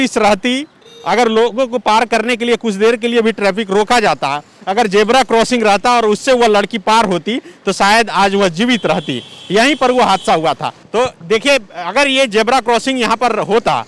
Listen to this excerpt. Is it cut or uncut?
uncut